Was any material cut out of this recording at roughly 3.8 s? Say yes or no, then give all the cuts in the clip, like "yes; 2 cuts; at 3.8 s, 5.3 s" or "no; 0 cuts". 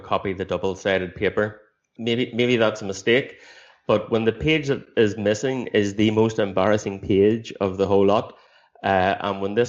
no; 1 cut; at 1.9 s